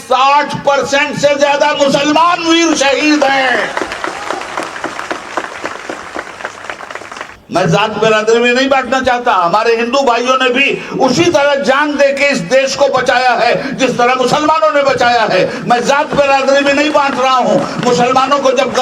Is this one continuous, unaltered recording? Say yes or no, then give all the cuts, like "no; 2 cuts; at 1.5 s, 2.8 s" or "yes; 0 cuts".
no; 1 cut; at 7.3 s